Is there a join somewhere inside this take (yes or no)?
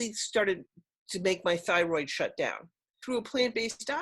yes